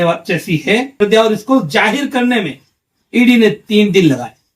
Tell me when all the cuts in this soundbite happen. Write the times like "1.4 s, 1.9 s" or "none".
1.0 s